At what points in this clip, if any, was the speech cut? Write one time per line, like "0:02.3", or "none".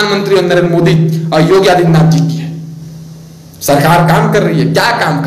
none